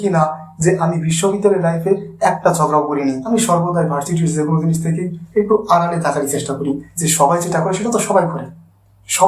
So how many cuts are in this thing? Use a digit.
2